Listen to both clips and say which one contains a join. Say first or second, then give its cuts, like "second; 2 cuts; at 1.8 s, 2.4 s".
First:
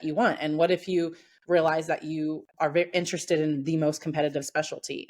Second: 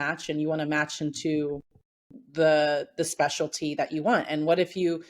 first; 1 cut; at 2.5 s